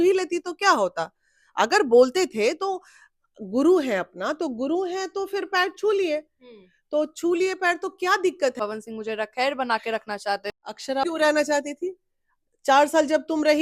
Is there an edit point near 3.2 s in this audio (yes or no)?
no